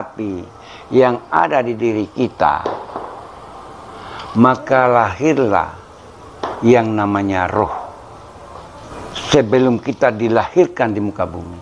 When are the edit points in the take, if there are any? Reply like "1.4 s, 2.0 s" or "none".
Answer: 8.8 s